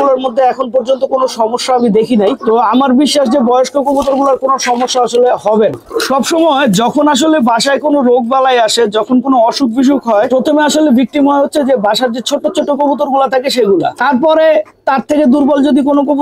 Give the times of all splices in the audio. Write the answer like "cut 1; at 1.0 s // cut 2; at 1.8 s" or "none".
none